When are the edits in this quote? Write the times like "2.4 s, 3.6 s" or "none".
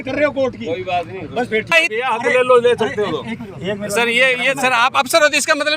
1.7 s